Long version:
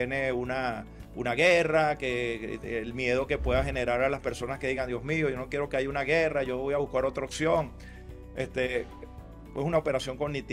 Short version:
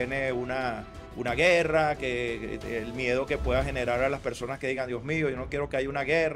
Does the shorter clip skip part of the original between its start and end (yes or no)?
no